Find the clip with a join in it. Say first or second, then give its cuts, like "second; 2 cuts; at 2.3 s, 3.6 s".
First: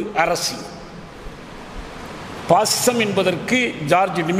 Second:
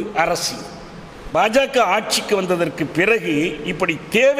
second; 1 cut; at 1.3 s